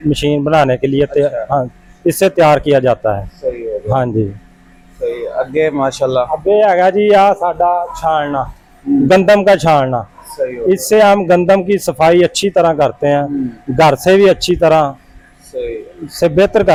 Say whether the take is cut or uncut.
uncut